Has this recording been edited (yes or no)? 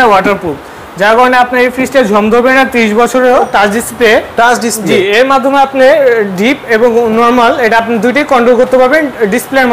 yes